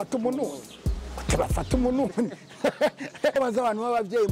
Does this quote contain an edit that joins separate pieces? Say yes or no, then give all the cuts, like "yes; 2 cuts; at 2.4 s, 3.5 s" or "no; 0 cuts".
yes; 1 cut; at 3.4 s